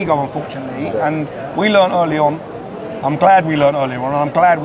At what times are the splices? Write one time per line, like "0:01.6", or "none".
none